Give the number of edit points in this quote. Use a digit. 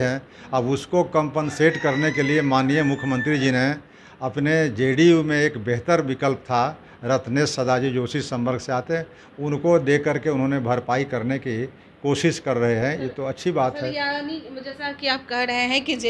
0